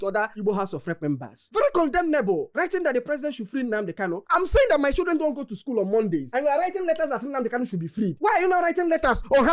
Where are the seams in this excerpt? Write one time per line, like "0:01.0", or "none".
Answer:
0:04.2